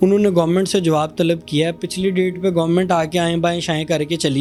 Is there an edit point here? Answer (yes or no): no